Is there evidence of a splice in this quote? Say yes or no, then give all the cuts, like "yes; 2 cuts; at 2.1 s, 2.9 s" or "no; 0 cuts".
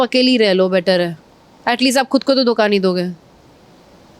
no; 0 cuts